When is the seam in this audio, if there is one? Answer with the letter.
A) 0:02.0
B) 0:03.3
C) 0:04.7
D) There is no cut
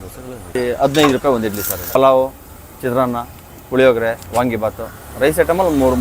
A